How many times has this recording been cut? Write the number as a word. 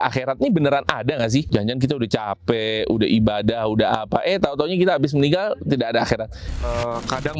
two